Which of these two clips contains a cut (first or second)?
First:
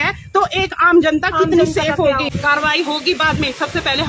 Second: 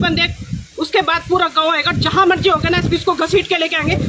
first